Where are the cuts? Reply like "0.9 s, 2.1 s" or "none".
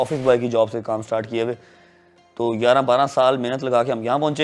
none

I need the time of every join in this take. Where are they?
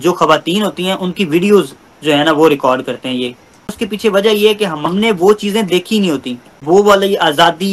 3.7 s, 4.8 s, 6.5 s

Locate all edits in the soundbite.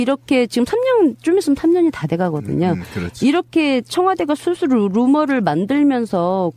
4.6 s

